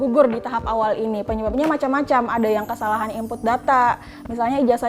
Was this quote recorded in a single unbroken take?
yes; 0 cuts

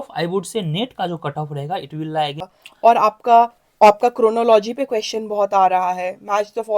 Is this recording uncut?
no; 1 cut; at 2.6 s

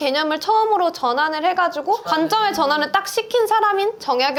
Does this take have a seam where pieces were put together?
no; 0 cuts

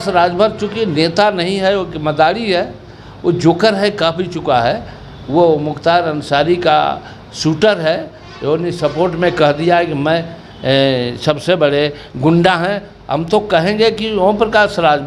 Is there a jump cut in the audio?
no; 0 cuts

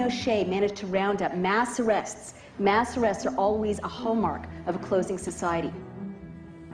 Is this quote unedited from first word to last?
no; 1 cut; at 5.5 s

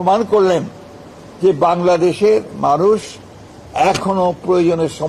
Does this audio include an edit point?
no; 0 cuts

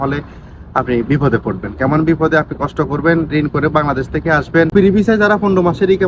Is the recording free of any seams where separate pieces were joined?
no; 1 cut; at 4.7 s

